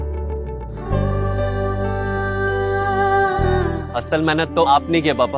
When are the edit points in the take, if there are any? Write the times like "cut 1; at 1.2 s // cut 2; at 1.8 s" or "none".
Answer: cut 1; at 3.6 s